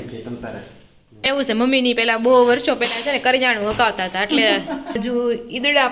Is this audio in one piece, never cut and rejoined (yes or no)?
no